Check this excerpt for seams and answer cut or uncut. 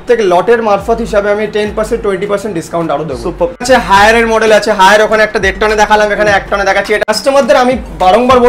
cut